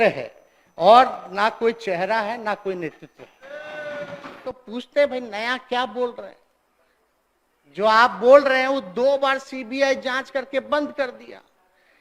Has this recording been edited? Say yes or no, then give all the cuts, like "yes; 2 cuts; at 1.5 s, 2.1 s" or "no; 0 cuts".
yes; 1 cut; at 4.4 s